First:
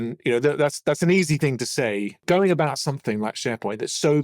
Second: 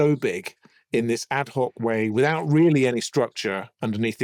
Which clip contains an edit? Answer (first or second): first